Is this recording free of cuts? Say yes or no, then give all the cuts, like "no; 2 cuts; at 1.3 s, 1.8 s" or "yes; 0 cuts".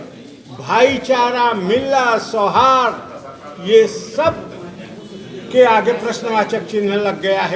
yes; 0 cuts